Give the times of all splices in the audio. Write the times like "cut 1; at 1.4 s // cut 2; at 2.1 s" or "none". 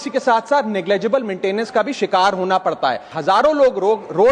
cut 1; at 3.1 s